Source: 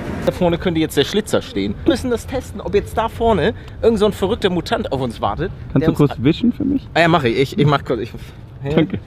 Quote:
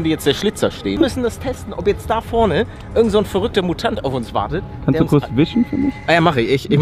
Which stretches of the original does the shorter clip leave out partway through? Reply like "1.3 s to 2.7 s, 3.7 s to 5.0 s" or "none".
1.7 s to 1.8 s

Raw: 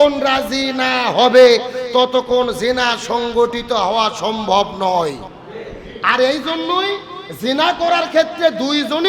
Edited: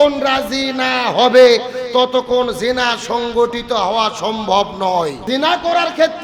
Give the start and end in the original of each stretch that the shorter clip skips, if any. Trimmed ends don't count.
5.2 s to 7.3 s

